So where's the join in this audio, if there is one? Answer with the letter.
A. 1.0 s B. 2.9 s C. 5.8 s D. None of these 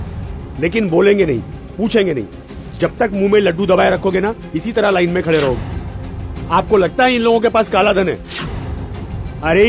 B